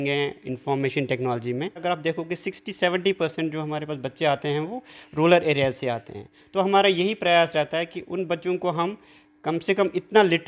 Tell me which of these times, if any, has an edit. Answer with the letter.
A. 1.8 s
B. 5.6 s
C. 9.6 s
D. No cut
A